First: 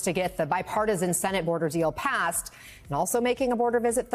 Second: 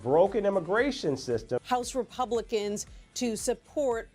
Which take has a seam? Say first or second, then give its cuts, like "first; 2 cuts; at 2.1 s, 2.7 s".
second; 1 cut; at 1.5 s